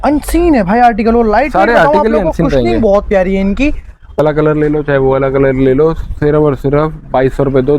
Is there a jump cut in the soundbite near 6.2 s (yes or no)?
no